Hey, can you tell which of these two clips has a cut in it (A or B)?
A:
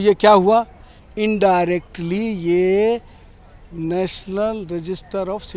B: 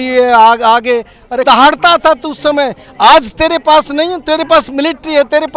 B